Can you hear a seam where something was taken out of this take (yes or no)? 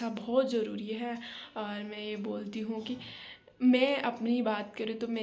no